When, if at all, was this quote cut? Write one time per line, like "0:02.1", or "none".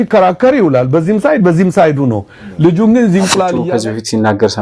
0:03.6